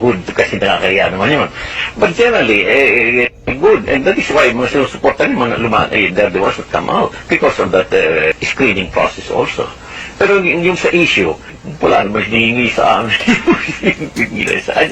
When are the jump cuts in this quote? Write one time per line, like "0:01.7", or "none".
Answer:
0:07.2
0:08.4
0:11.6